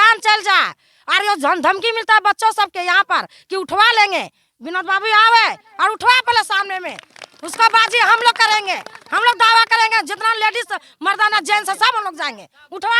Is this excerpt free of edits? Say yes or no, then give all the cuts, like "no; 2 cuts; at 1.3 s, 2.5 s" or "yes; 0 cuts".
yes; 0 cuts